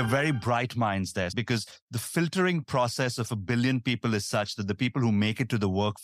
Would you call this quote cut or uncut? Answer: cut